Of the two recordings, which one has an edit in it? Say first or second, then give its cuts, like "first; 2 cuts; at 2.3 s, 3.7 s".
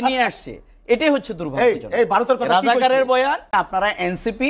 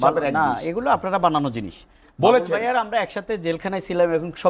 first; 1 cut; at 3.4 s